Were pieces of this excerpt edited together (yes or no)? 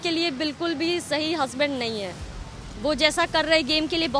no